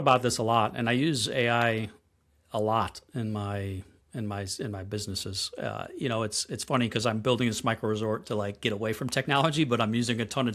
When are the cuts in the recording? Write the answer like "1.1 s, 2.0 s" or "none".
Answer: none